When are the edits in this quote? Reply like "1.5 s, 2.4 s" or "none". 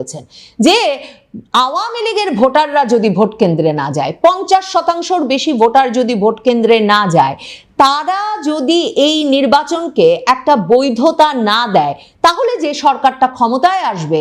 none